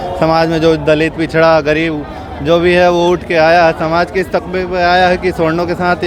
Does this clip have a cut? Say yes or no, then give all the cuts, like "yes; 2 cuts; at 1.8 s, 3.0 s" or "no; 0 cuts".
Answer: no; 0 cuts